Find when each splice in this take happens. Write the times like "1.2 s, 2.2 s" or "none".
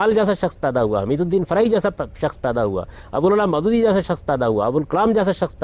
none